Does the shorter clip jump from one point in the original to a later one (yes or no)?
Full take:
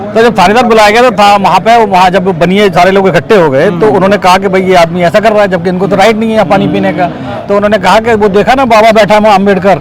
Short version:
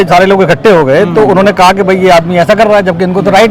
no